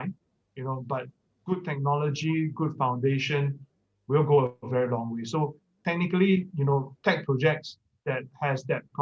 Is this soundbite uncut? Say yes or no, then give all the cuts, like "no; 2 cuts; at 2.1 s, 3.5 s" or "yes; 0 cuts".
yes; 0 cuts